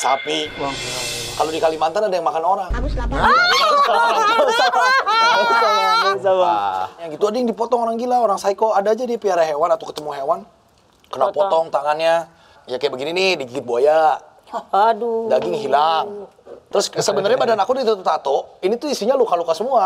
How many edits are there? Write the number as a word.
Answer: three